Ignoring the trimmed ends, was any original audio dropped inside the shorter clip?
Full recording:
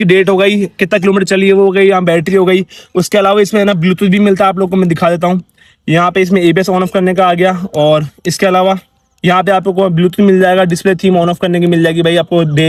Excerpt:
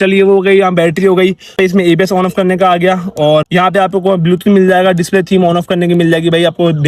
yes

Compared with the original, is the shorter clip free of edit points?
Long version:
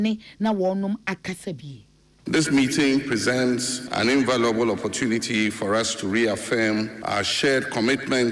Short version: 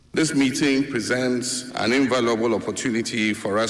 yes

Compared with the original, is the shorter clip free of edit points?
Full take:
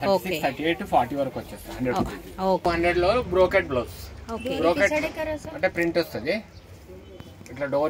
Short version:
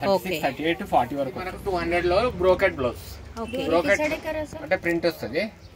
no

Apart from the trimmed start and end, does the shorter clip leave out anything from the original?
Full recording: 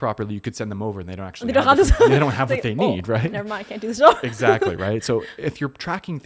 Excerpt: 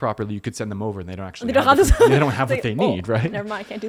no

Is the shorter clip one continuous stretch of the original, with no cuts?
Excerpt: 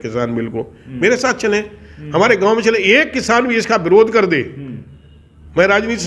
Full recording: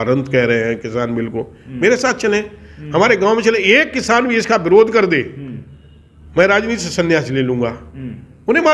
yes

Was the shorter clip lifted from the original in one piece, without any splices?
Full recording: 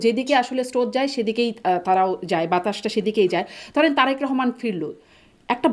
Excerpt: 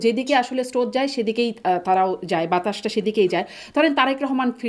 yes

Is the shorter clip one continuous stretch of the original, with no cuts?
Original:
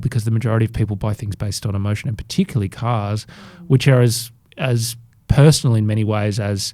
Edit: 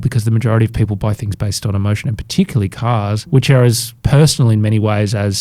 no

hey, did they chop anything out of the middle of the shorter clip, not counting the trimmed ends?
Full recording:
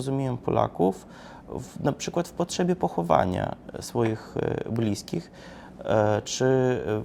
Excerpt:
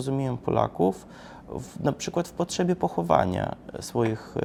no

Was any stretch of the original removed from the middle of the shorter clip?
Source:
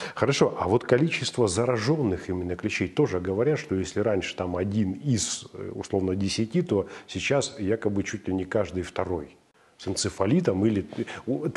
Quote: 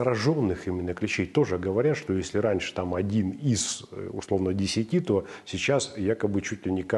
no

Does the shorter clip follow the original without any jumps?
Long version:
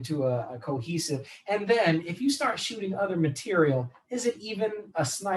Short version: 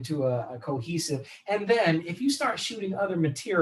yes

